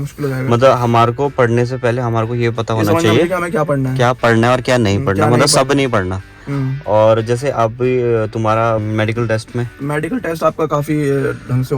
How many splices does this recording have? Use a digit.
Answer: 1